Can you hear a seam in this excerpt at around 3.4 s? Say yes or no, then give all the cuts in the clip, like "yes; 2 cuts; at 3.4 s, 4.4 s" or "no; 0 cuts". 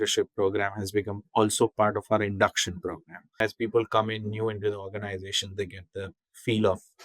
yes; 1 cut; at 3.4 s